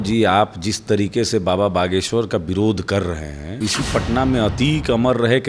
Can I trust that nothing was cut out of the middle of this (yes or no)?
no